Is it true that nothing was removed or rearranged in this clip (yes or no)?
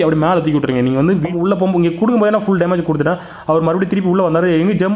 no